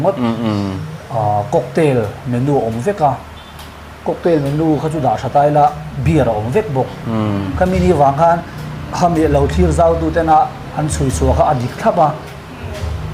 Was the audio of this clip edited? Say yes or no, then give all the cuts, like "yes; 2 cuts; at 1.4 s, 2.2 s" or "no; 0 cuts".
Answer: no; 0 cuts